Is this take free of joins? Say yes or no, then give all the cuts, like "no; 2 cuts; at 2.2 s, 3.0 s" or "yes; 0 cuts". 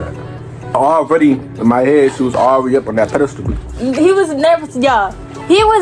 no; 2 cuts; at 0.7 s, 3.4 s